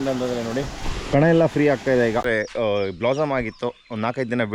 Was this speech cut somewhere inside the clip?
yes; 1 cut; at 2.2 s

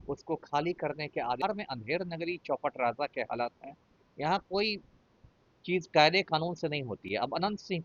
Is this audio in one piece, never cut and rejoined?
no; 1 cut; at 1.4 s

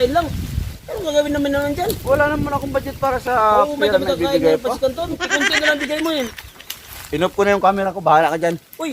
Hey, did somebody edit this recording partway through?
yes; 1 cut; at 5.3 s

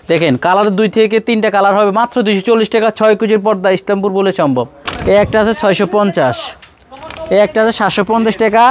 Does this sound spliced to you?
yes; 1 cut; at 4.8 s

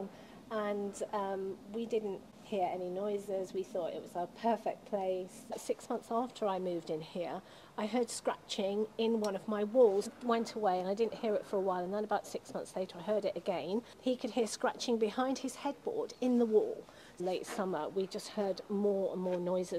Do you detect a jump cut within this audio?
yes; 4 cuts; at 5.6 s, 10.1 s, 13.9 s, 17.2 s

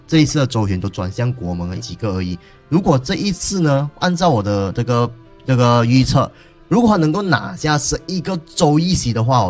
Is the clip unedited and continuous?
no; 1 cut; at 1.8 s

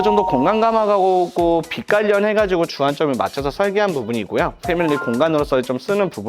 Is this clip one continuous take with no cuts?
no; 1 cut; at 4.6 s

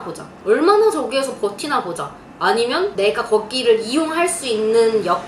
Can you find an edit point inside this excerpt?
no; 0 cuts

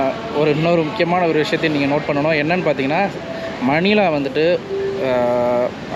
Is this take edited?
no; 0 cuts

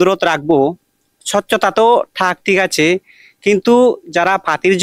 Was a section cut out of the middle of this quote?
no; 0 cuts

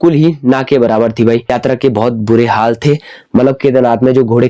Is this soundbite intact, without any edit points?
no; 1 cut; at 1.6 s

